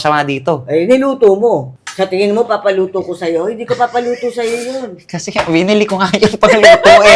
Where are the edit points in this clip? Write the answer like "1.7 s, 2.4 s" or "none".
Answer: 1.8 s